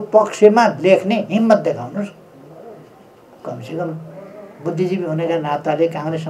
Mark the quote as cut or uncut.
uncut